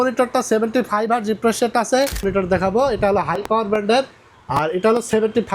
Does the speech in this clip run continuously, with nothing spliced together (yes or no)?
no